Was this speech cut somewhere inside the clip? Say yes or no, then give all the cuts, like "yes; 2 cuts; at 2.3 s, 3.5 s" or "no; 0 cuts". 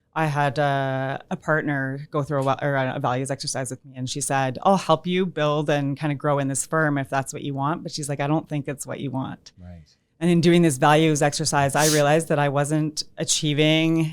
yes; 1 cut; at 1.2 s